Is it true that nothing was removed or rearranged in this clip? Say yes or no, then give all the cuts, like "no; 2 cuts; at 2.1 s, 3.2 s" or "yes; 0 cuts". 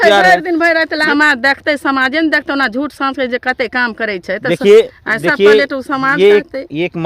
no; 1 cut; at 1.0 s